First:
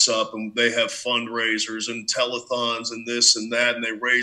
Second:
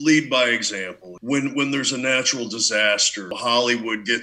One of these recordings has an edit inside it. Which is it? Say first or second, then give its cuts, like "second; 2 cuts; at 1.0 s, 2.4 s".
second; 2 cuts; at 1.1 s, 3.4 s